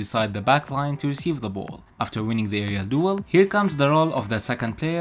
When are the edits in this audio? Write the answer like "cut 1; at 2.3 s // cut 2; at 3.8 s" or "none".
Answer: cut 1; at 1.8 s // cut 2; at 3.2 s